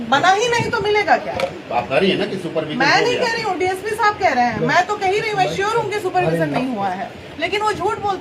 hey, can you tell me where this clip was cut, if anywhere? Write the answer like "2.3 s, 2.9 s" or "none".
none